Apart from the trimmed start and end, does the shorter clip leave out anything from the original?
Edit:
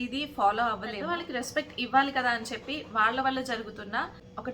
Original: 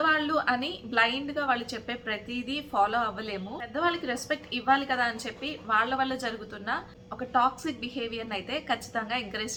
yes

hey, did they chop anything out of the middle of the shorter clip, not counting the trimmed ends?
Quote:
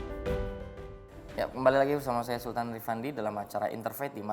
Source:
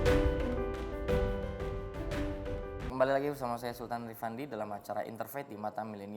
yes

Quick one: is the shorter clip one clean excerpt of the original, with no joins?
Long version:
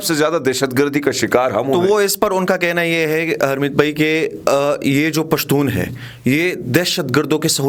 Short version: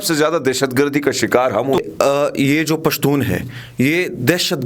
no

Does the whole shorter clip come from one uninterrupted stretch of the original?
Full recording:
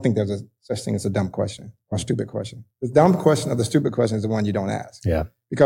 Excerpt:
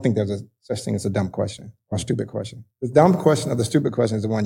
yes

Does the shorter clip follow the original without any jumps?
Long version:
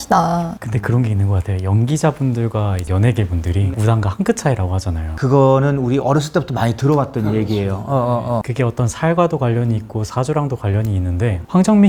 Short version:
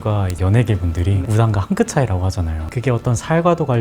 no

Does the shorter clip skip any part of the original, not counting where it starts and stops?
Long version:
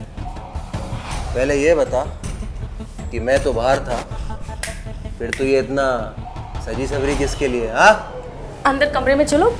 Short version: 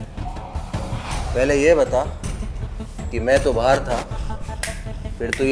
no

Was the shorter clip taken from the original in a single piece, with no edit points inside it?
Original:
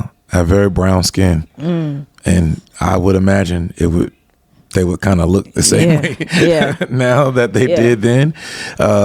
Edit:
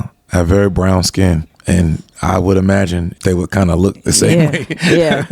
no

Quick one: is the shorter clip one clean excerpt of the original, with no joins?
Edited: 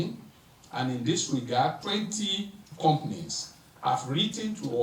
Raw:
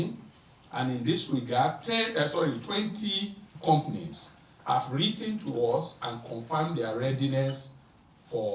no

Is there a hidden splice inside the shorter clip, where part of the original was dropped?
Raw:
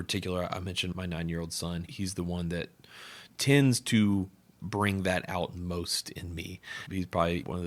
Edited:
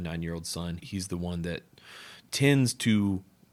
no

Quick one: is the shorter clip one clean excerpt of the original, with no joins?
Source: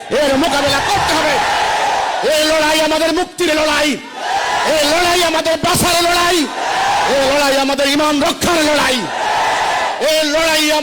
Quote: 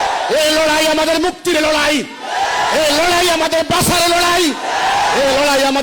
yes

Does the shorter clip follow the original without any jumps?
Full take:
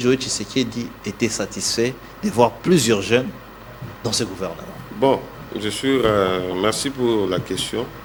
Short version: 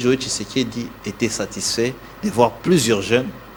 yes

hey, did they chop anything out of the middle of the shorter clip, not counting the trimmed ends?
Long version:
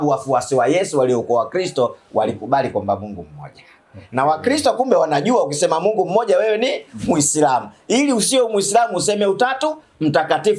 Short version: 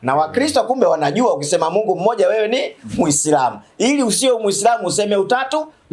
no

